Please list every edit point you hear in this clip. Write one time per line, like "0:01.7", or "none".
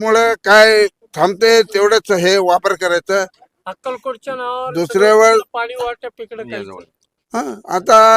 none